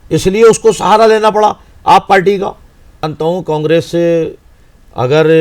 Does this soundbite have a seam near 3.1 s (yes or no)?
yes